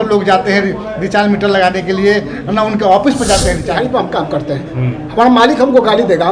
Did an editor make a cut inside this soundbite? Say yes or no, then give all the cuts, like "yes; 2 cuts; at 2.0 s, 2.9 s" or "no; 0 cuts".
yes; 1 cut; at 3.9 s